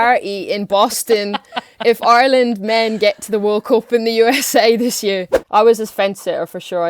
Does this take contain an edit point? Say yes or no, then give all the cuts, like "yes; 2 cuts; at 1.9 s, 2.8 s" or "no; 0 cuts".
yes; 1 cut; at 5.3 s